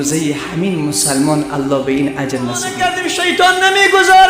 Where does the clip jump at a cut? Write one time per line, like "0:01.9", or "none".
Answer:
0:02.7